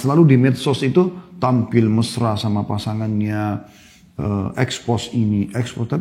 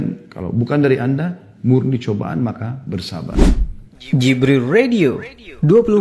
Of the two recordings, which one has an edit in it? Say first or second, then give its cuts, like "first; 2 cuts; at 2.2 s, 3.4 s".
second; 1 cut; at 3.3 s